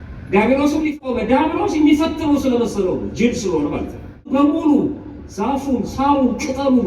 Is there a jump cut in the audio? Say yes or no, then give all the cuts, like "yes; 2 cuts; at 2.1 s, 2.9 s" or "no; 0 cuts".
yes; 2 cuts; at 1.0 s, 4.3 s